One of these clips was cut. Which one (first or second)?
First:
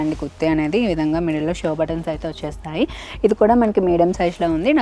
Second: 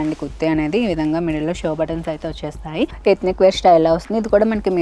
second